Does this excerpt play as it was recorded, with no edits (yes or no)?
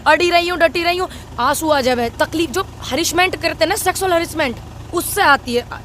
no